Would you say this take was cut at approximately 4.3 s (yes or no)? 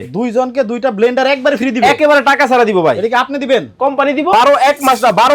yes